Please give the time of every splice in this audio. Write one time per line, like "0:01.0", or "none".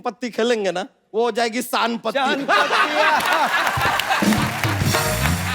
0:01.0